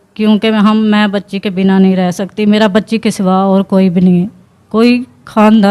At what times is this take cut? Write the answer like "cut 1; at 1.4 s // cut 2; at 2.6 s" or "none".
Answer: none